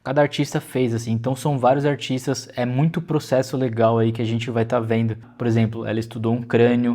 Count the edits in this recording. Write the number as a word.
one